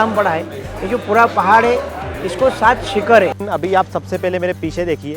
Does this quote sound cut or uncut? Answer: cut